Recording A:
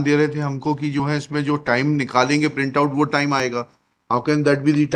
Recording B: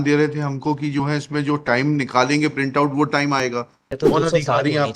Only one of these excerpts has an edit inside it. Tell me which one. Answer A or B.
B